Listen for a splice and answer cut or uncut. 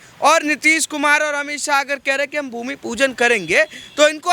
uncut